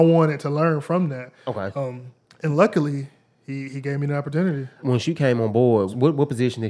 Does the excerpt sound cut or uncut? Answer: cut